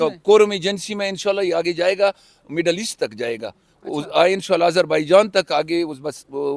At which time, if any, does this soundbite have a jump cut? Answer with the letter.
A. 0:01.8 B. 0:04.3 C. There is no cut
C